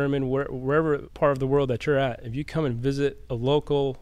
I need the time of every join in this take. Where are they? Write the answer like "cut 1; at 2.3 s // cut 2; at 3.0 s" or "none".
cut 1; at 1.1 s